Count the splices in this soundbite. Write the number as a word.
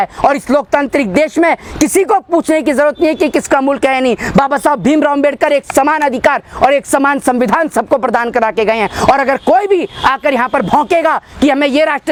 zero